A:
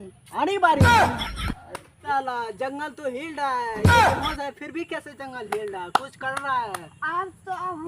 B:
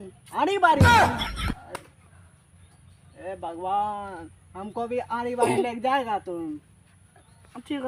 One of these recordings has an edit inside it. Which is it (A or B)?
A